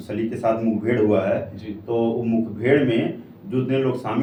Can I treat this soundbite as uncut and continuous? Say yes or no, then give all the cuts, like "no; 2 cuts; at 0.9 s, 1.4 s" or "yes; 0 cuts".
yes; 0 cuts